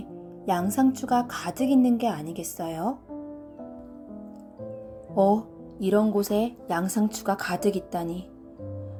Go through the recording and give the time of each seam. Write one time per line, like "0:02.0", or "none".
none